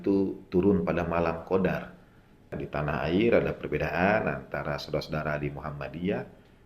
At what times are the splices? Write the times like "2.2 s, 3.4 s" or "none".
2.6 s